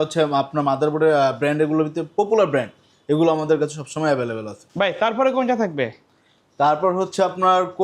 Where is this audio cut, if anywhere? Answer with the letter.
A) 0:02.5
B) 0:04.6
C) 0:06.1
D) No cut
D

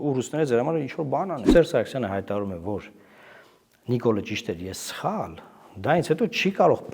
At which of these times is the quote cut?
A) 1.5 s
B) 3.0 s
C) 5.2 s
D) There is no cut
A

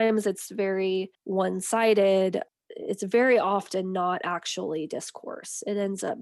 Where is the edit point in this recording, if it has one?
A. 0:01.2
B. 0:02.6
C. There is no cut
A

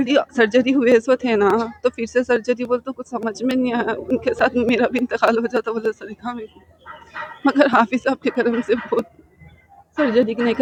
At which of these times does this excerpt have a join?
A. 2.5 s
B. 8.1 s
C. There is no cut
C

